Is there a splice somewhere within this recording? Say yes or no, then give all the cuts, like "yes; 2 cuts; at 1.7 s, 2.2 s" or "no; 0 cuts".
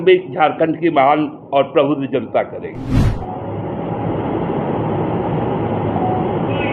yes; 1 cut; at 3.0 s